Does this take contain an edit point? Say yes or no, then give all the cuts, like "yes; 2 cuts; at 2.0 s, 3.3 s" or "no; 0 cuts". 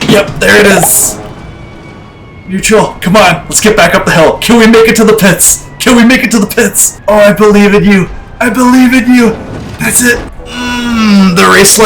yes; 2 cuts; at 6.9 s, 10.4 s